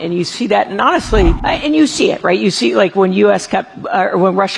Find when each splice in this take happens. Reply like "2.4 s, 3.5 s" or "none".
1.4 s